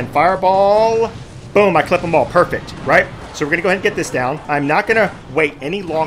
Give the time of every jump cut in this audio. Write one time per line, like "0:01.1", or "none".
none